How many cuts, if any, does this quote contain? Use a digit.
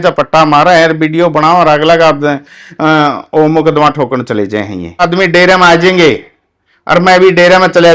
1